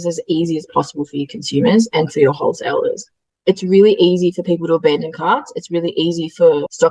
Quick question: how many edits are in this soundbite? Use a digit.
1